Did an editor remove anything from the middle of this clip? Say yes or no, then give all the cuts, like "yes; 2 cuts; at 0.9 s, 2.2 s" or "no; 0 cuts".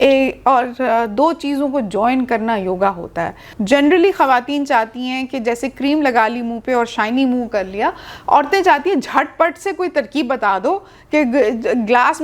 yes; 1 cut; at 3.5 s